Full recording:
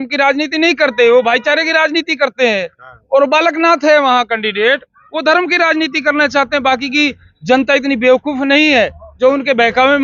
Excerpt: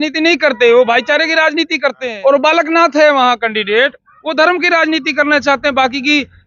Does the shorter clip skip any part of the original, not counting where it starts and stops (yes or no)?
yes